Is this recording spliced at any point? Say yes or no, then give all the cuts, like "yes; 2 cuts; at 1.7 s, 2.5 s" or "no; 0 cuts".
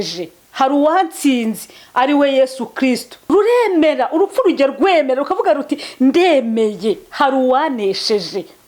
yes; 1 cut; at 3.3 s